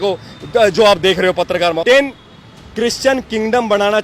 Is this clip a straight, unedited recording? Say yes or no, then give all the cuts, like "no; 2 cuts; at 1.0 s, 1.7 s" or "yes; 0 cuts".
no; 1 cut; at 1.8 s